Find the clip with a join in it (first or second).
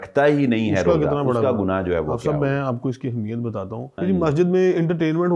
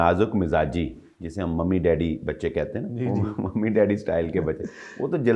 first